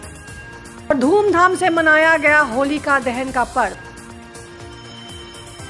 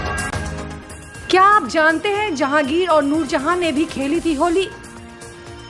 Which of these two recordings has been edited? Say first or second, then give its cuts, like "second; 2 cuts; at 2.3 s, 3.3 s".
second; 1 cut; at 1.0 s